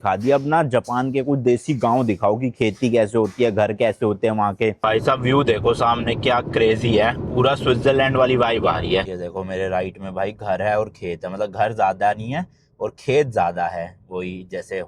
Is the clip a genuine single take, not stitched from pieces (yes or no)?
no